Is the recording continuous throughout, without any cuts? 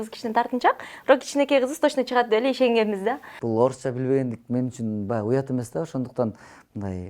no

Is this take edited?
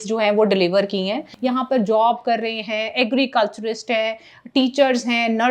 yes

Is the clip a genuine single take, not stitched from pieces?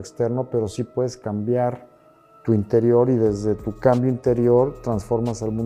yes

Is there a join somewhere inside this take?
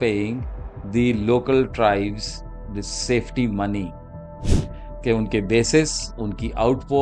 no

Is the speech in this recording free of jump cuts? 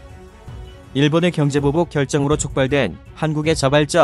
no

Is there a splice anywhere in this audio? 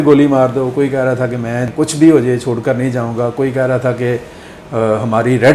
no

